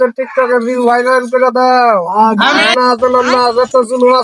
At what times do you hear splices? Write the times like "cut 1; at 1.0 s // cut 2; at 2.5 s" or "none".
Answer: cut 1; at 2.7 s